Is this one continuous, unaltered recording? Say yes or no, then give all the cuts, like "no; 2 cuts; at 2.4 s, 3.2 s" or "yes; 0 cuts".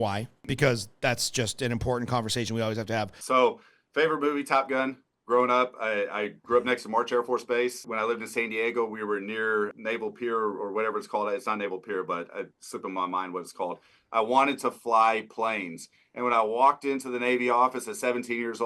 no; 1 cut; at 3.2 s